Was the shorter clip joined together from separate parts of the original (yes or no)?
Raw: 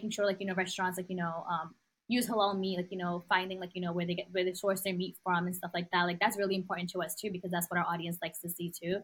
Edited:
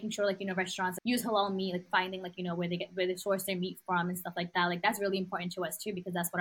yes